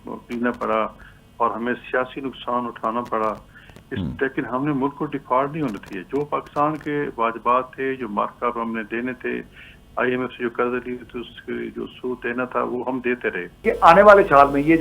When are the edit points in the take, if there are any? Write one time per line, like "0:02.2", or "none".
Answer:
0:13.7